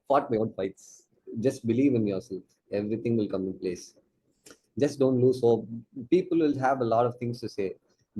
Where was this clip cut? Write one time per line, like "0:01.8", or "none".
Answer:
0:01.2